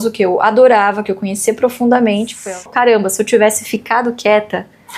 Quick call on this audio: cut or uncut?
cut